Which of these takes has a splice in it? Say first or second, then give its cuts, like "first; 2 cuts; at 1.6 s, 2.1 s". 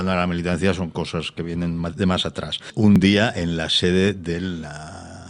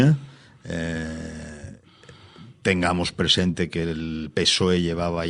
first; 1 cut; at 3.0 s